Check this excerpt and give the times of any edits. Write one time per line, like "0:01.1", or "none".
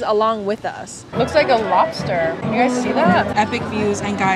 0:01.1
0:02.4
0:03.3